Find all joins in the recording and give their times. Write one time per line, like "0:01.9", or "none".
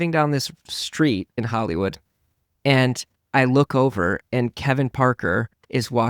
0:01.3